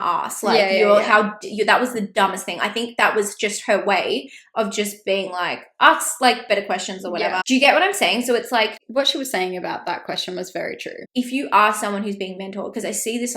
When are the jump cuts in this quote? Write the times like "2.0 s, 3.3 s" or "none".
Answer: 7.4 s, 8.8 s, 10.9 s